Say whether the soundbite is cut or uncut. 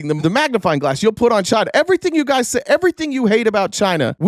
uncut